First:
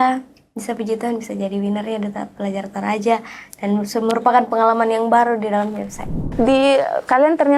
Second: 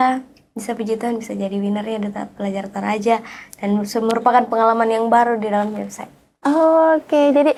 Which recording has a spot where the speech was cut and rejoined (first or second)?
first